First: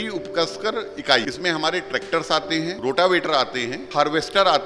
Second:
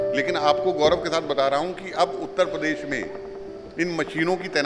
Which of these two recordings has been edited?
first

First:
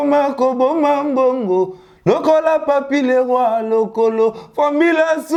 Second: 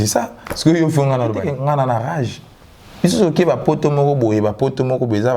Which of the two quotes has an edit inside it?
second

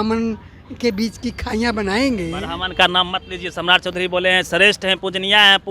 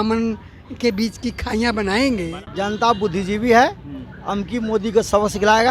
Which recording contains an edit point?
second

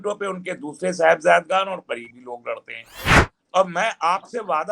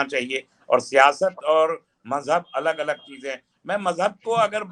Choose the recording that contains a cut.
first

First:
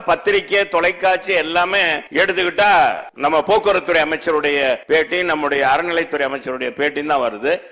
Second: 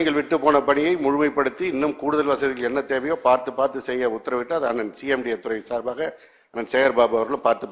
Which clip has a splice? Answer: first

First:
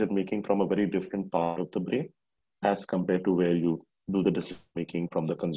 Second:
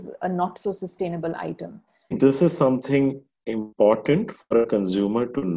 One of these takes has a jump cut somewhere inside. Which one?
second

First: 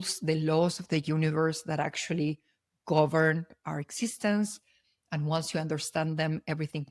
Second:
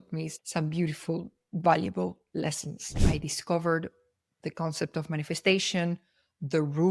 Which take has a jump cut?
second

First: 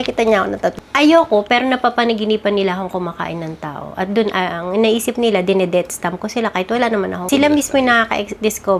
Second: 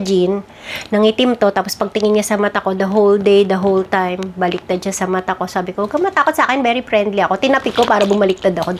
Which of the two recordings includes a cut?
first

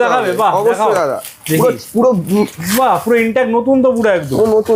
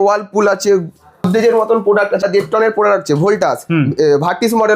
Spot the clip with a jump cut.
second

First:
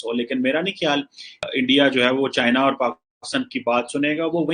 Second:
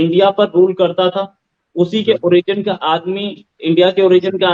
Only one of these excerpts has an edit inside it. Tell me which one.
first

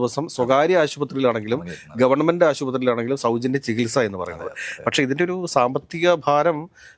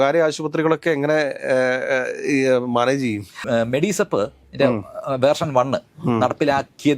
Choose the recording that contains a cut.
second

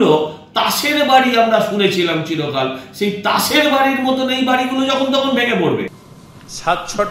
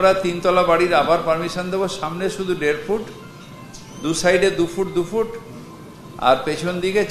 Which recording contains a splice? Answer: first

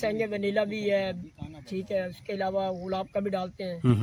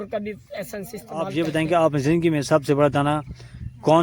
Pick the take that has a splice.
second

